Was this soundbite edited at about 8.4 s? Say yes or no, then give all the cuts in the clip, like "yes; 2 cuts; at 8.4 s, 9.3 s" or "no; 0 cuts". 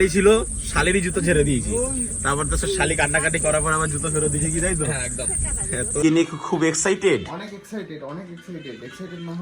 no; 1 cut; at 6.0 s